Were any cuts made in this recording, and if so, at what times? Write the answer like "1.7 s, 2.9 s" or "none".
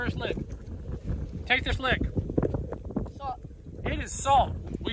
1.8 s